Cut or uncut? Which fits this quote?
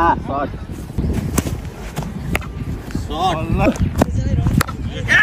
cut